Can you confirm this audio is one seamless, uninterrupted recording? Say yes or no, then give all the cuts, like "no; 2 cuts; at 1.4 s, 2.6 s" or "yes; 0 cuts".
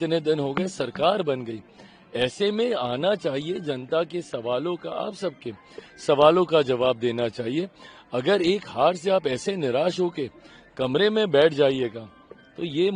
yes; 0 cuts